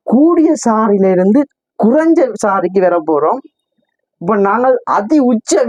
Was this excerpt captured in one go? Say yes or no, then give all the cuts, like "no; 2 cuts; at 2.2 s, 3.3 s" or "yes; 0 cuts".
yes; 0 cuts